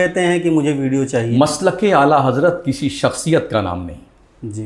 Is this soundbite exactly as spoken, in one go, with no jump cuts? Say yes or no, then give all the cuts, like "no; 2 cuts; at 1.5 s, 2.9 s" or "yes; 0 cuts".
no; 1 cut; at 1.3 s